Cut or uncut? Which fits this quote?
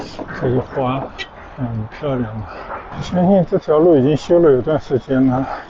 cut